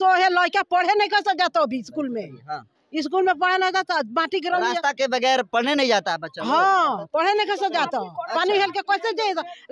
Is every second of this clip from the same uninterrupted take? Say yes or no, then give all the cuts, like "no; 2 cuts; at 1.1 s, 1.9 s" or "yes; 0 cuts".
yes; 0 cuts